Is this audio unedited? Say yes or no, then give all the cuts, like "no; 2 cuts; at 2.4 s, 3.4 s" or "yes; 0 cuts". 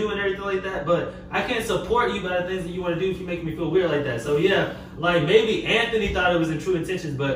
yes; 0 cuts